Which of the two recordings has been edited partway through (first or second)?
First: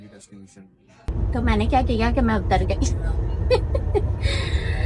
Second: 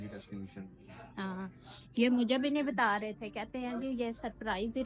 first